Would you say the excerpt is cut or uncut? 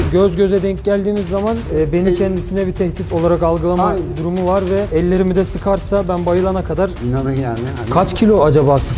cut